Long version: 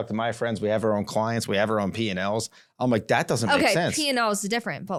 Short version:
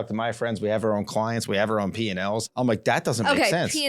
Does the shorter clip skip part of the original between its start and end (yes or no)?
yes